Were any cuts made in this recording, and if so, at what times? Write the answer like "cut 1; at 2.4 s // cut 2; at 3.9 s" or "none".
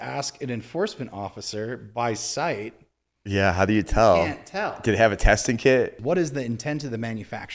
cut 1; at 6.0 s